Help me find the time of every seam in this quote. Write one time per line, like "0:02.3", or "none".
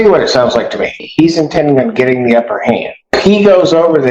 0:01.0
0:03.2